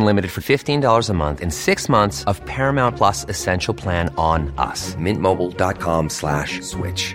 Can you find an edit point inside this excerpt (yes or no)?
no